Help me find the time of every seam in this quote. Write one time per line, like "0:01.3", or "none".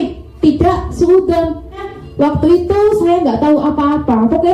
0:01.9